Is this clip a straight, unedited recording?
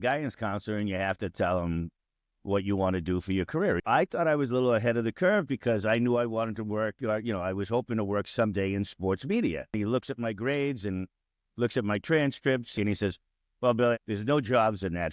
no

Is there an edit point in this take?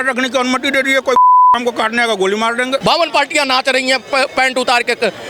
yes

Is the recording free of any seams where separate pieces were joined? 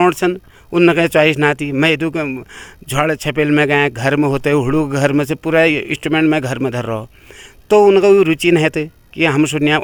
yes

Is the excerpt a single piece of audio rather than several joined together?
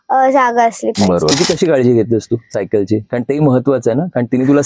no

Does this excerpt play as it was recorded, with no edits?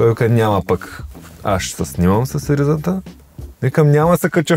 yes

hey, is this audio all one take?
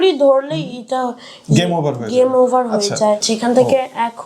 no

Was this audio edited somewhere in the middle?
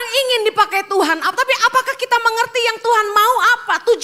no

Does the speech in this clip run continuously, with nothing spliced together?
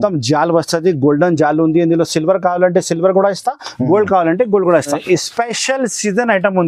no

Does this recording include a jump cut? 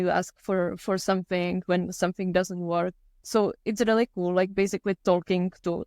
yes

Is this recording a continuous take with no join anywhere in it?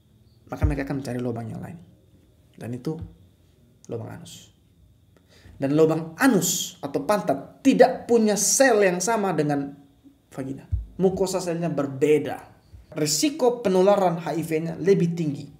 no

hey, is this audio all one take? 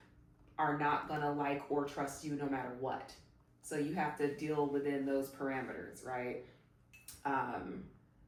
yes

